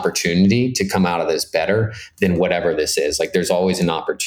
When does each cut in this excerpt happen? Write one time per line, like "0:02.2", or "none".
none